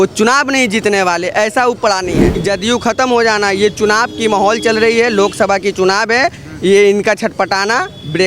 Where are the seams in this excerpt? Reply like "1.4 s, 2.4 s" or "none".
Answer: 2.3 s